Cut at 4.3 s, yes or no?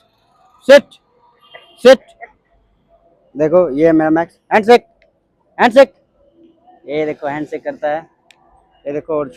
no